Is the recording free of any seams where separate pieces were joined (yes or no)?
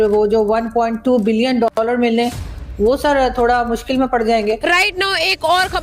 no